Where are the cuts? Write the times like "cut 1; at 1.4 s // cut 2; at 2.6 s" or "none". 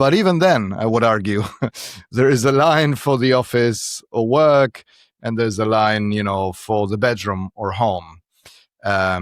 none